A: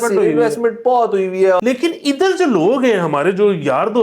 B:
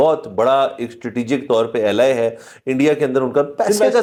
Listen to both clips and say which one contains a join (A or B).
A